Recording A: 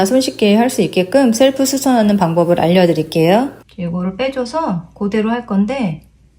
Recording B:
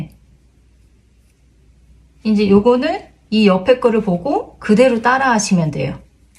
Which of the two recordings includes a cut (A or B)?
A